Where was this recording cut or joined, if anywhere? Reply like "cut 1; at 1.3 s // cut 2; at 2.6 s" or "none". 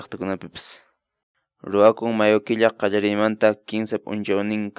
cut 1; at 1.2 s